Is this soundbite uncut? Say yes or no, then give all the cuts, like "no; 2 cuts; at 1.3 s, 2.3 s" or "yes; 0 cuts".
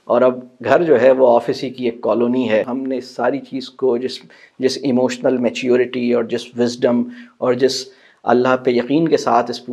no; 1 cut; at 2.7 s